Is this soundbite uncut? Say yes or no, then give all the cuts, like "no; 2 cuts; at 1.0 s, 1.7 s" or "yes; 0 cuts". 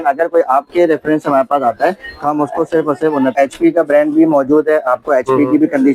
no; 1 cut; at 3.3 s